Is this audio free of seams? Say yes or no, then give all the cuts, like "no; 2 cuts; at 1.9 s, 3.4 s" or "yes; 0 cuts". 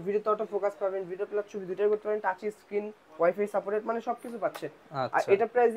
yes; 0 cuts